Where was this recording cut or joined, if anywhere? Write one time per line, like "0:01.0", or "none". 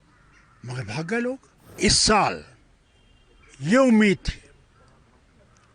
0:01.8